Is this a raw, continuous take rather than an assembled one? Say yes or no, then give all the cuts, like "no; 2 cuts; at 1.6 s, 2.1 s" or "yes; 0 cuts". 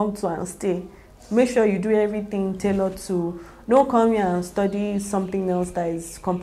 yes; 0 cuts